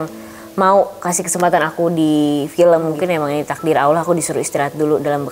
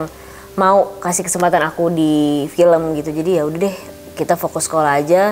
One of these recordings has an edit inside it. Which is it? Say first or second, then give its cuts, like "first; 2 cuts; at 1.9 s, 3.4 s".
first; 1 cut; at 2.9 s